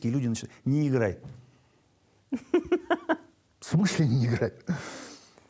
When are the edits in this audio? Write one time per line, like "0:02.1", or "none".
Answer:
none